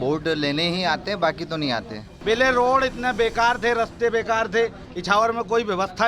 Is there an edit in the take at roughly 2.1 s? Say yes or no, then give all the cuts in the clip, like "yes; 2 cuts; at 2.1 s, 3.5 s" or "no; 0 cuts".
yes; 1 cut; at 2.1 s